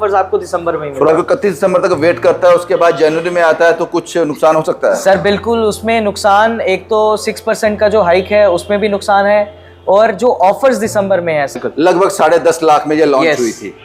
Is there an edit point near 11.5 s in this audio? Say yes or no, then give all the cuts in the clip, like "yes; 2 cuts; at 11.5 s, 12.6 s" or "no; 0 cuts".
yes; 2 cuts; at 1.1 s, 11.5 s